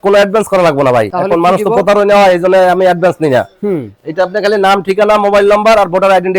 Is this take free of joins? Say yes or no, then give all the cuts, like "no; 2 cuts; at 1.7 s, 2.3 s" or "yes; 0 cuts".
yes; 0 cuts